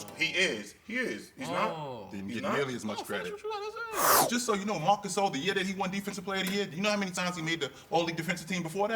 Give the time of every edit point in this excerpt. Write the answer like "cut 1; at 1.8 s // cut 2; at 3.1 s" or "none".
cut 1; at 4.2 s // cut 2; at 7.1 s